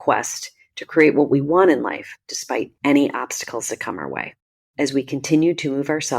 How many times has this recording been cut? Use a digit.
1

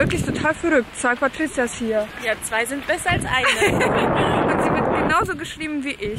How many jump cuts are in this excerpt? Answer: 0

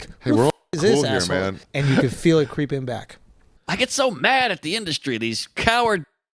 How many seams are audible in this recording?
2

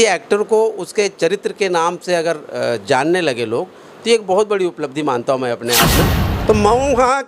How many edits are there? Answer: 1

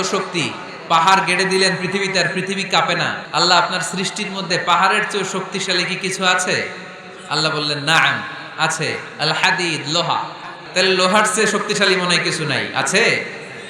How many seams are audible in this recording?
2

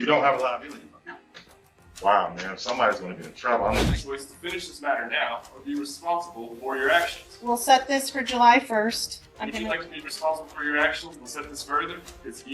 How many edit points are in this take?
1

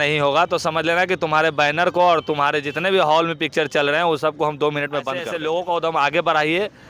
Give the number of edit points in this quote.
1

